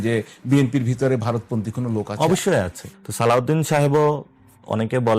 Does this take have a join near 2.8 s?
yes; 1 cut; at 2.8 s

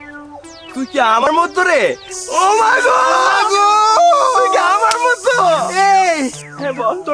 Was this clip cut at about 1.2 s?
yes; 1 cut; at 1.2 s

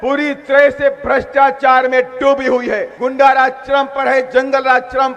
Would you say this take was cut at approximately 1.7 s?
no; 1 cut; at 2.9 s

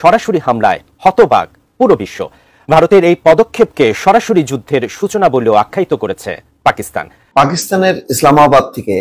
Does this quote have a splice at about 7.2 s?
yes; 1 cut; at 7.2 s

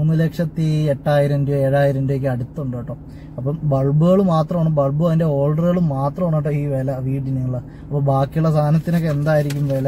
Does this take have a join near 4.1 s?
no; 0 cuts

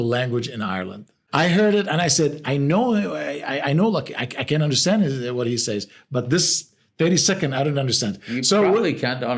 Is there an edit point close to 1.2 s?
yes; 1 cut; at 1.2 s

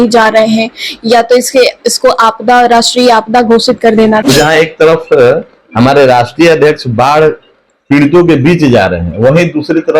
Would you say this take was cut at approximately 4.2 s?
yes; 1 cut; at 4.2 s

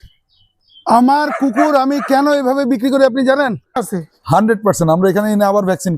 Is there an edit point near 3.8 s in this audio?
yes; 1 cut; at 3.8 s

